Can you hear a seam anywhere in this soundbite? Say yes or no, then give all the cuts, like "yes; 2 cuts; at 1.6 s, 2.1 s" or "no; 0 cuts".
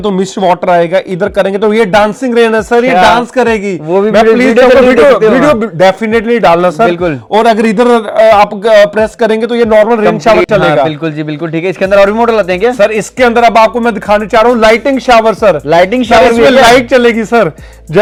no; 0 cuts